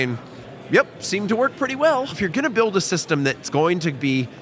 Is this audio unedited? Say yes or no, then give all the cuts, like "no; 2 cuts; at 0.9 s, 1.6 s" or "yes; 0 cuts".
no; 1 cut; at 2.2 s